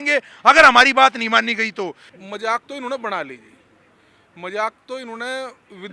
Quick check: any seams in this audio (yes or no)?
yes